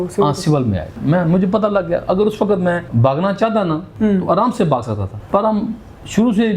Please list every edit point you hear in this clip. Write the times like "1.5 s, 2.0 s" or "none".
0.9 s, 2.9 s, 3.9 s, 5.1 s